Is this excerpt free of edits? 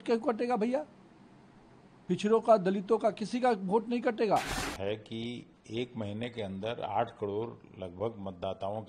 no; 1 cut; at 4.6 s

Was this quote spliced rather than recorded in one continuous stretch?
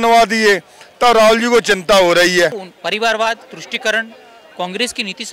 yes; 1 cut; at 2.7 s

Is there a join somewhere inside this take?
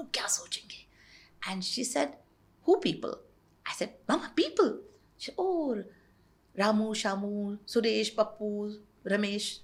no; 0 cuts

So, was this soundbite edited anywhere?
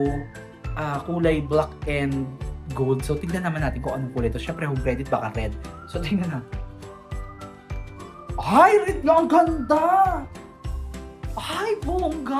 no; 0 cuts

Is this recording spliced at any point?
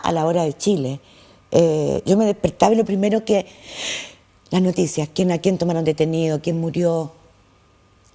yes; 1 cut; at 3.7 s

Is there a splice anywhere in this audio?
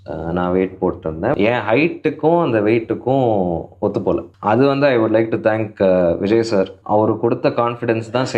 yes; 3 cuts; at 1.3 s, 4.3 s, 6.8 s

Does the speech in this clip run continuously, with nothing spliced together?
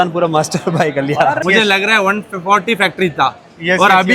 no; 1 cut; at 1.4 s

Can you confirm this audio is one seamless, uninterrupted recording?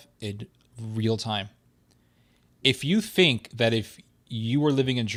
yes; 0 cuts

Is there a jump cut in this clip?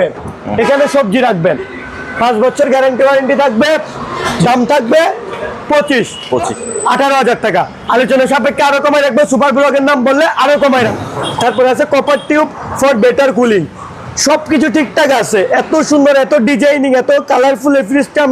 yes; 2 cuts; at 6.6 s, 10.7 s

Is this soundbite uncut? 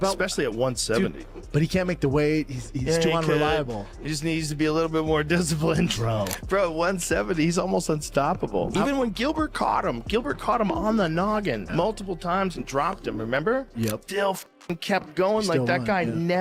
yes; 0 cuts

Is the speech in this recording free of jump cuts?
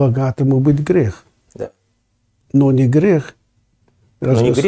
yes; 0 cuts

